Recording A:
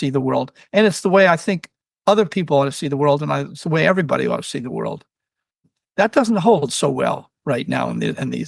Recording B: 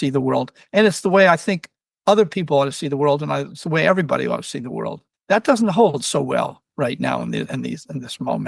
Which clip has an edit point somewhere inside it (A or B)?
B